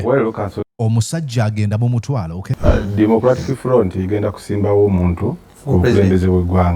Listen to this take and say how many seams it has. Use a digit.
1